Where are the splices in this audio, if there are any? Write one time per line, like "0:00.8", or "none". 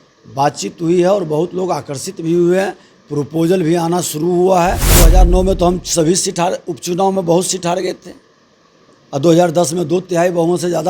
0:05.1